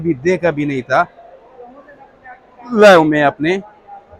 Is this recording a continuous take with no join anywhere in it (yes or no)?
yes